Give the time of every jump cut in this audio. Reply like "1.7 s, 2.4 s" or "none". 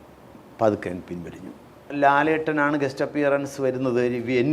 1.9 s